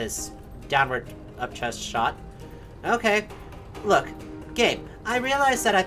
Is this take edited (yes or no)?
no